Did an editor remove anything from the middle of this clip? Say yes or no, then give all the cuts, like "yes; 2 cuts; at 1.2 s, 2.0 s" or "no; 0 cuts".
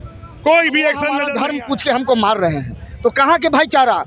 yes; 1 cut; at 1.3 s